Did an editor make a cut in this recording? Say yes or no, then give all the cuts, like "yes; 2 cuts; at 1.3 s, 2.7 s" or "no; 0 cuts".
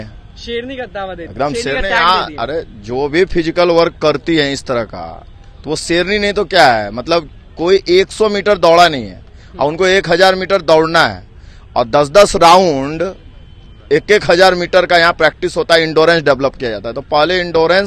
no; 0 cuts